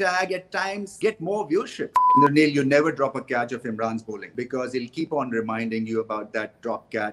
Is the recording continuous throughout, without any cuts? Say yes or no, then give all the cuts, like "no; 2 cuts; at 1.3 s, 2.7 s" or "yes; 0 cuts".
no; 3 cuts; at 0.9 s, 2.0 s, 4.2 s